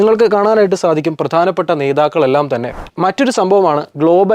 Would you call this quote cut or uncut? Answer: cut